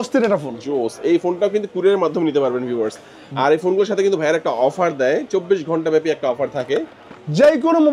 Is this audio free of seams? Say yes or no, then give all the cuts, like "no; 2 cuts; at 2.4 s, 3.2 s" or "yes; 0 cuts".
yes; 0 cuts